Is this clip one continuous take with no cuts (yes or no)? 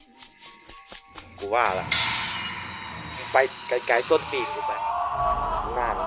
no